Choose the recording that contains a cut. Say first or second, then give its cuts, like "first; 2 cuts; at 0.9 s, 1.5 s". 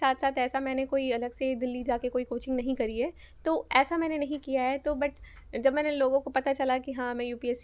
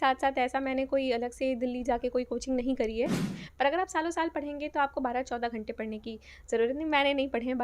second; 1 cut; at 3.3 s